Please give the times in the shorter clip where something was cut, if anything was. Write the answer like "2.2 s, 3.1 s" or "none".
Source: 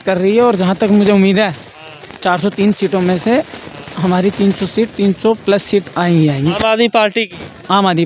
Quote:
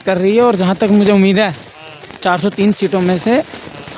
none